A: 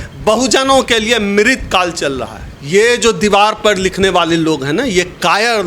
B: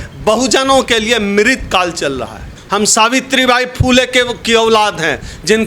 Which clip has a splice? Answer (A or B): B